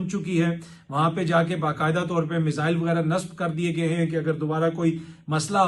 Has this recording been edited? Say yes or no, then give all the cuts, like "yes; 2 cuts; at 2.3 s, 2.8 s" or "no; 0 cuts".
no; 0 cuts